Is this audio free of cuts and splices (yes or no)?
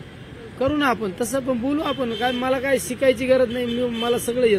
yes